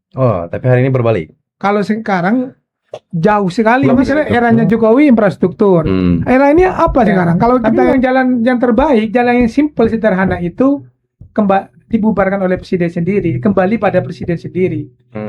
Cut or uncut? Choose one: cut